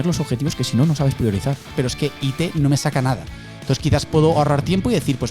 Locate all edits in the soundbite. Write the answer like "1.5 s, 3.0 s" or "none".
1.8 s